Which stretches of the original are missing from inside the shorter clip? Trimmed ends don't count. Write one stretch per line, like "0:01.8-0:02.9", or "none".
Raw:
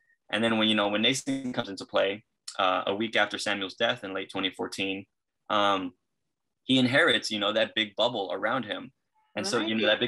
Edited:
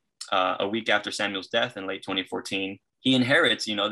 0:05.1-0:06.5